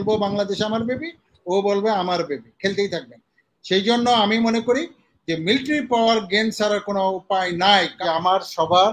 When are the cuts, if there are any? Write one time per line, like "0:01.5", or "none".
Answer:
0:07.9